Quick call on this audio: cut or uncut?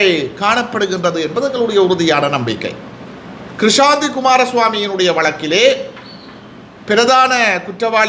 uncut